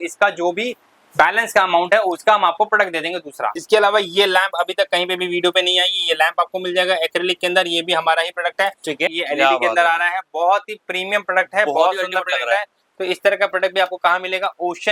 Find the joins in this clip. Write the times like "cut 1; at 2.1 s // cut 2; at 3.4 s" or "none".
cut 1; at 3.6 s // cut 2; at 9.1 s

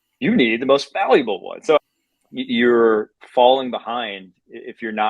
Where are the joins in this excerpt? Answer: cut 1; at 1.8 s

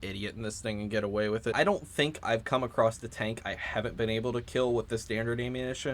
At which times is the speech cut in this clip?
cut 1; at 1.5 s

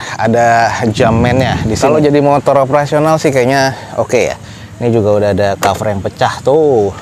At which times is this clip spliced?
cut 1; at 1.7 s

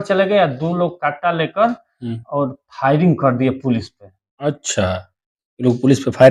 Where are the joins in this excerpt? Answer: none

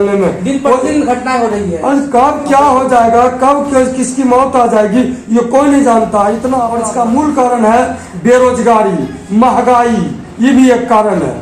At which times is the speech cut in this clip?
cut 1; at 6.7 s

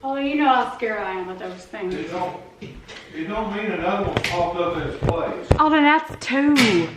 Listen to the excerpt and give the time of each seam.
none

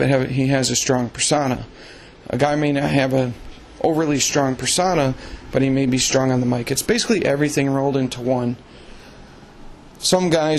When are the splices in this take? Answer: none

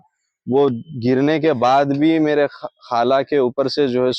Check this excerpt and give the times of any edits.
none

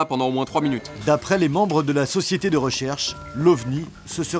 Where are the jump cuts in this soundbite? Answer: cut 1; at 0.9 s

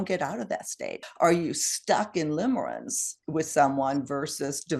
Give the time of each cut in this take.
cut 1; at 1.0 s

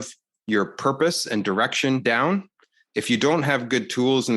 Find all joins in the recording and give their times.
cut 1; at 2.0 s

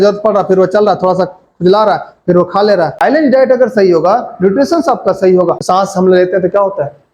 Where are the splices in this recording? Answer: cut 1; at 3.2 s // cut 2; at 5.5 s

